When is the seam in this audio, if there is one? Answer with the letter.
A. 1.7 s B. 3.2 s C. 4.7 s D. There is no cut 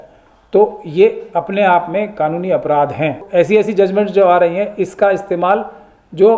B